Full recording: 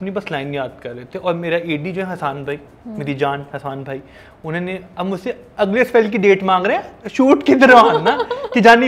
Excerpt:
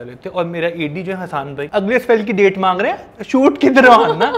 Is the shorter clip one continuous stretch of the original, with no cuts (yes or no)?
no